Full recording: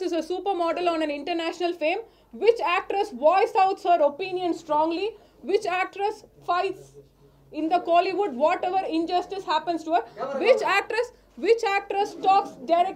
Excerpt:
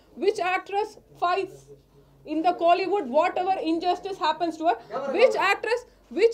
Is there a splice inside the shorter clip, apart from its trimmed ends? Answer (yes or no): no